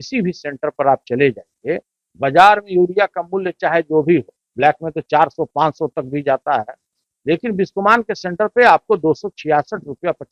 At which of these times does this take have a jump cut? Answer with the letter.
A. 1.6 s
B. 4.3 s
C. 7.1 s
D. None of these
D